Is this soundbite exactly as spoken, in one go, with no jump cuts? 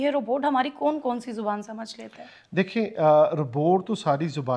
yes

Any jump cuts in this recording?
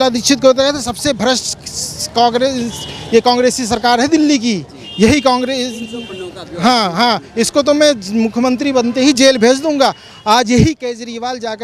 no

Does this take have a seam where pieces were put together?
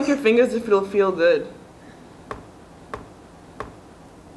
no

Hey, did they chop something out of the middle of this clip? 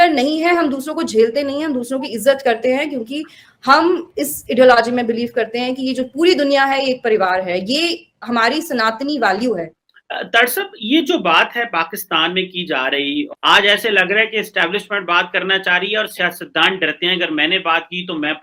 no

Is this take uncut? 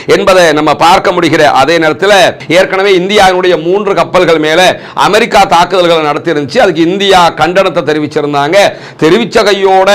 no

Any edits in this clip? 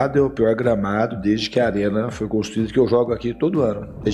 no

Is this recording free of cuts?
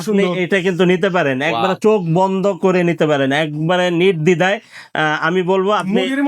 yes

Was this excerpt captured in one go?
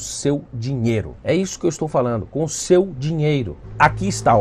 yes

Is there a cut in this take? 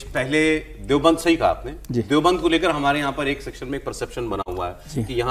no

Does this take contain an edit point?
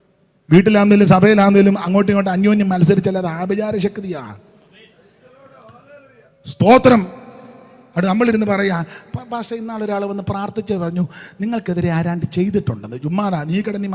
no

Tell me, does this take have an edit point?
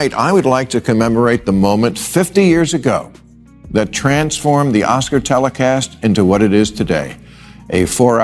no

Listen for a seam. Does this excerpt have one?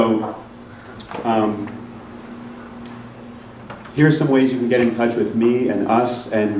no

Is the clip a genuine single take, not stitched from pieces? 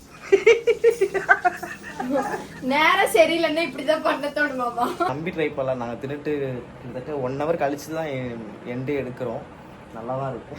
no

